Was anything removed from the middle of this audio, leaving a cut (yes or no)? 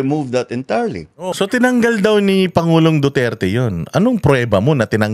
yes